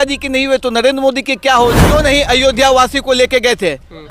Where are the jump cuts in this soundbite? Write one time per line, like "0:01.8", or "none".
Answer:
0:01.8